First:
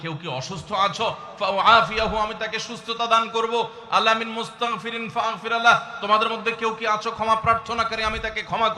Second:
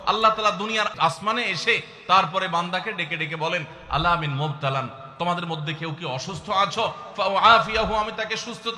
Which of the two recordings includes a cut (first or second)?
second